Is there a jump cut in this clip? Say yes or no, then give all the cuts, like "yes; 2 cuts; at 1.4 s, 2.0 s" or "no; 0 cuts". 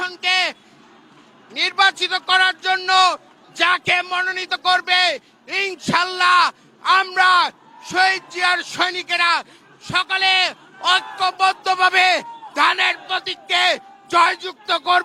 no; 0 cuts